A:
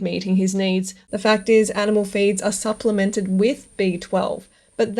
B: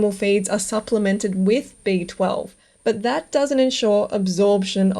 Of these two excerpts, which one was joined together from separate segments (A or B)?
A